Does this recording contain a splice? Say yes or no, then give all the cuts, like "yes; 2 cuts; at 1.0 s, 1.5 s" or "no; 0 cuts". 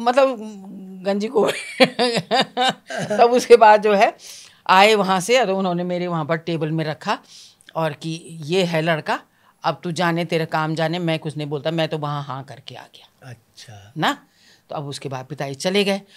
no; 0 cuts